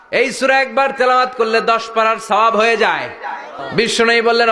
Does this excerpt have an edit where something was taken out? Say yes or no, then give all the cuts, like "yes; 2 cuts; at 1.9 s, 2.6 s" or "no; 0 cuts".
yes; 1 cut; at 3.5 s